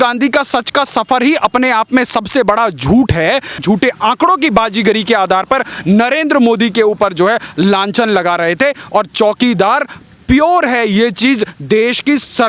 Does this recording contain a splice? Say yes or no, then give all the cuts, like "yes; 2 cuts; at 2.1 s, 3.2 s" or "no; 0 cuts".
yes; 1 cut; at 3.6 s